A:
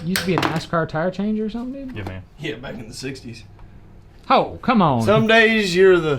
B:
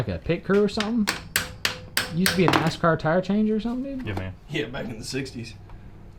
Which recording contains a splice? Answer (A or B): A